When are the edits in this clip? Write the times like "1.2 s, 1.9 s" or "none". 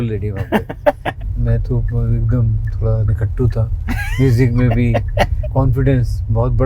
1.2 s, 5.3 s